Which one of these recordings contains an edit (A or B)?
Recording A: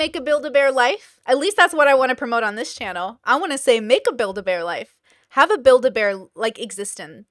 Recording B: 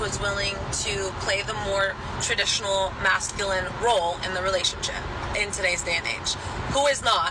A